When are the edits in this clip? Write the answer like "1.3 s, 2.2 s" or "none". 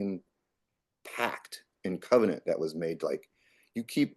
none